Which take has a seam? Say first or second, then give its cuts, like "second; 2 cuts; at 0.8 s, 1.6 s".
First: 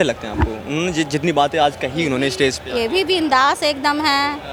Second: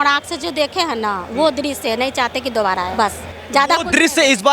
second; 1 cut; at 2.9 s